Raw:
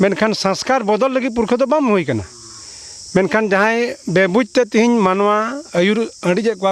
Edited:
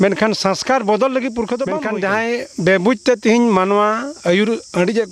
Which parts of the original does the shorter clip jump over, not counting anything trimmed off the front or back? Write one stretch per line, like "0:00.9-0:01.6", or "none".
0:01.8-0:03.3